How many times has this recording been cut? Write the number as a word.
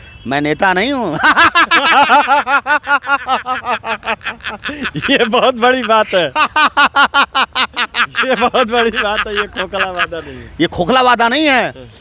zero